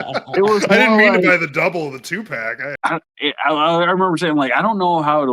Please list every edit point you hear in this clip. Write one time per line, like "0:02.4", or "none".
0:02.6